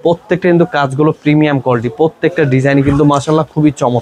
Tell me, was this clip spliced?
no; 0 cuts

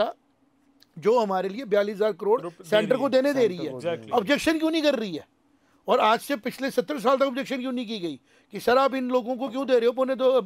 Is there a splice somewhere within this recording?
no; 0 cuts

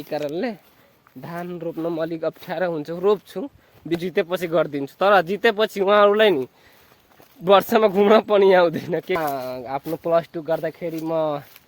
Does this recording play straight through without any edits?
no; 2 cuts; at 4.0 s, 9.2 s

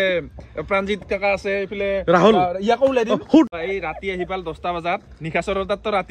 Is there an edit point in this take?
yes; 1 cut; at 3.5 s

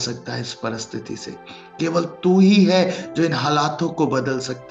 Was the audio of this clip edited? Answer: no; 0 cuts

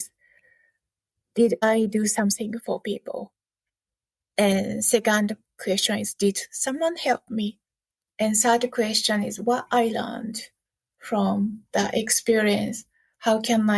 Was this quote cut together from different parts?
yes; 1 cut; at 1.6 s

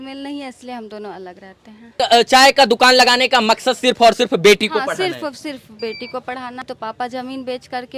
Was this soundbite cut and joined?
yes; 2 cuts; at 2.0 s, 6.6 s

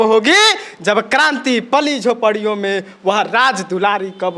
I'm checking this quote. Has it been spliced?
no; 0 cuts

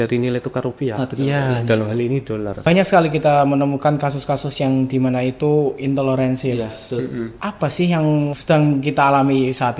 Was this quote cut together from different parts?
yes; 3 cuts; at 2.6 s, 7.3 s, 8.4 s

